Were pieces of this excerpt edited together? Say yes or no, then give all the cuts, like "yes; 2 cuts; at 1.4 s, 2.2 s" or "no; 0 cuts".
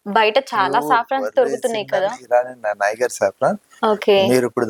no; 0 cuts